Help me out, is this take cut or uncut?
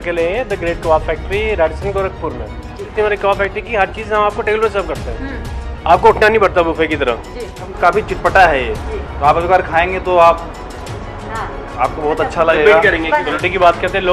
cut